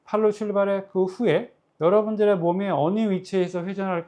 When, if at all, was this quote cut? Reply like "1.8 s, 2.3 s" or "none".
none